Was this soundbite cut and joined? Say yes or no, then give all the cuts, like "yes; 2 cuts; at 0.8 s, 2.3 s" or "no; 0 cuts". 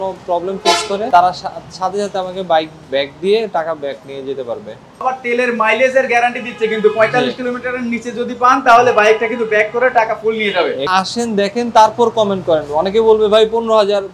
yes; 3 cuts; at 1.1 s, 5.0 s, 10.9 s